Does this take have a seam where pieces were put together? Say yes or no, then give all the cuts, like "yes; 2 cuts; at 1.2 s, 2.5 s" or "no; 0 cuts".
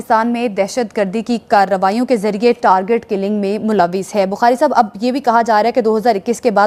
no; 0 cuts